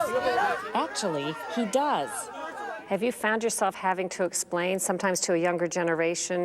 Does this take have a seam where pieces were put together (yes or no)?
yes